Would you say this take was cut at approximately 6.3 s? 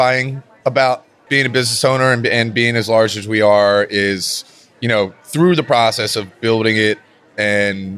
no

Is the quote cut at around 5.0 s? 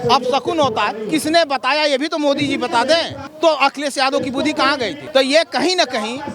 yes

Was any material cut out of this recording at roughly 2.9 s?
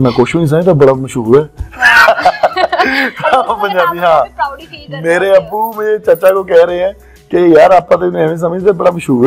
no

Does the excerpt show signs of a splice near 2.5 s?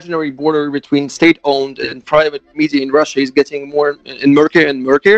yes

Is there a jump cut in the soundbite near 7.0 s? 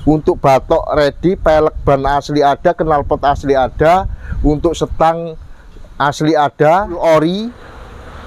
yes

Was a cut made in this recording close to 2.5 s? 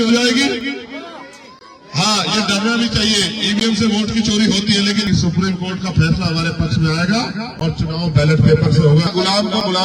no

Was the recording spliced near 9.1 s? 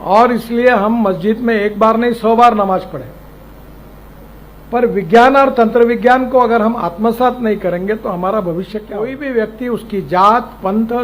yes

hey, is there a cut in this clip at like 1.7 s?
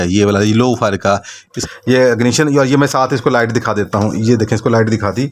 yes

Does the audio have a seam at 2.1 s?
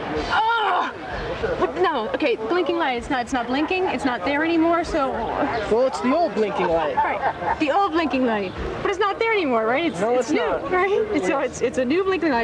yes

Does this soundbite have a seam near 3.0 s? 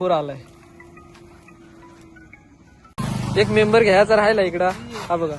yes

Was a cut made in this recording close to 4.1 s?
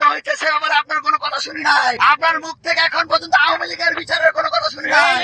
no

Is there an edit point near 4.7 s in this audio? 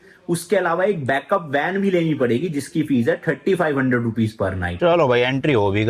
yes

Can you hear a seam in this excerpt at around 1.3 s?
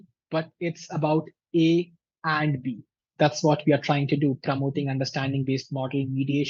no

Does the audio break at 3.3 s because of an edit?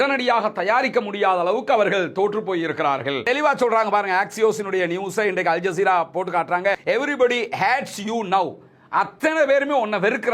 yes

